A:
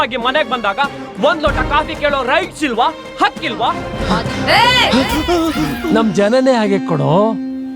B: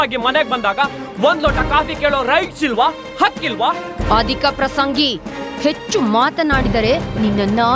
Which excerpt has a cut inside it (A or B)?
A